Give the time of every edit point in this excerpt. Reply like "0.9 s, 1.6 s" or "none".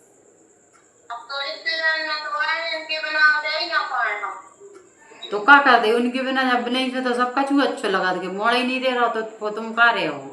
none